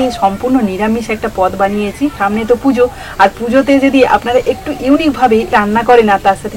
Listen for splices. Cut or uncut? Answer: cut